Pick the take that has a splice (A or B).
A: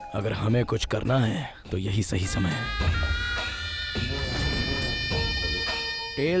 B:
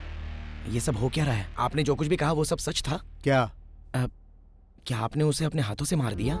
B